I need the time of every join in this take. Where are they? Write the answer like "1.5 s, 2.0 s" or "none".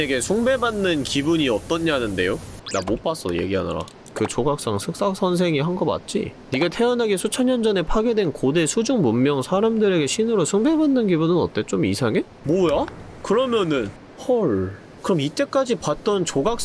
none